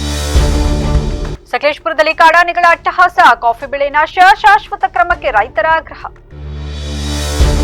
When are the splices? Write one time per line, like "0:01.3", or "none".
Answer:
none